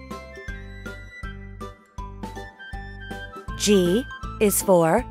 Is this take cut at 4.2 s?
yes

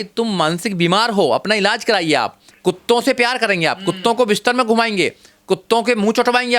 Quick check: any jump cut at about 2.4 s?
yes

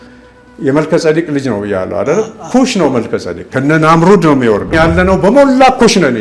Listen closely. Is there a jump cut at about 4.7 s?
yes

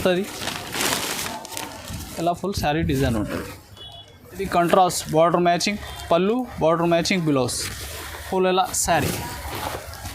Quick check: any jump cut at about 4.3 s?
yes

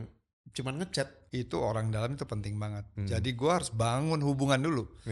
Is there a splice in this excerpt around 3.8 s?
no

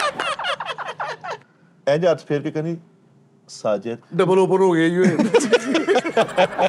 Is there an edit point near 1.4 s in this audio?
yes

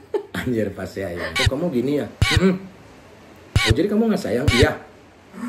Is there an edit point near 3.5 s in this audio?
no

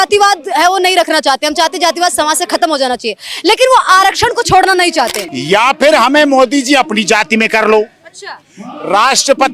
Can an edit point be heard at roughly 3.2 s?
no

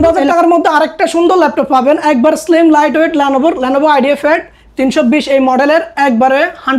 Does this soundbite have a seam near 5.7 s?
no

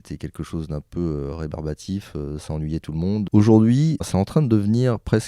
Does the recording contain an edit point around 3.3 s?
yes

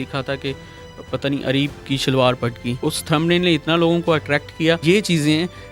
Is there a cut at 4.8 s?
yes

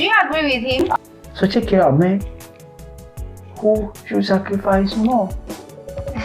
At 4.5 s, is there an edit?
no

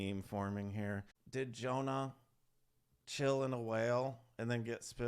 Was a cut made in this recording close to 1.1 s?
yes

